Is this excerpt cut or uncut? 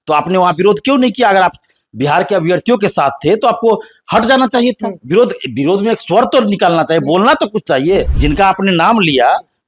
cut